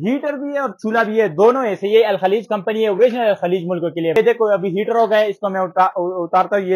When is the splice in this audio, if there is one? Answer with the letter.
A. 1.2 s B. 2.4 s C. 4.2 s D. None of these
C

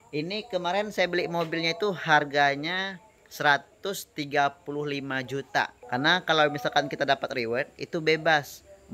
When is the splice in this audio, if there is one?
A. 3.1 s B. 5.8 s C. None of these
B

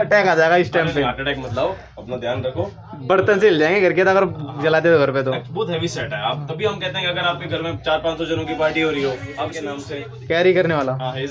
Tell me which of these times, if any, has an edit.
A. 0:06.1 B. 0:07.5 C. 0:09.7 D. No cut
C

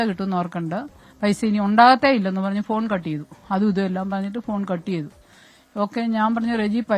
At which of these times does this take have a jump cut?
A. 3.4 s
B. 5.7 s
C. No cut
C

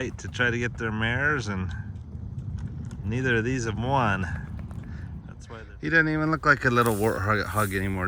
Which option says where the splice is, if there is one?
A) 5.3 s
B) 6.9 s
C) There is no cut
A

